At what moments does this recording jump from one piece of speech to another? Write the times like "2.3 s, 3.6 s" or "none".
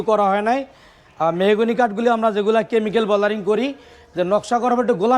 none